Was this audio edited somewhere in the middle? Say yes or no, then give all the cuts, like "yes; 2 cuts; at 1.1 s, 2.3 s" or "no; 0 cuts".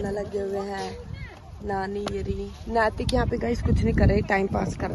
no; 0 cuts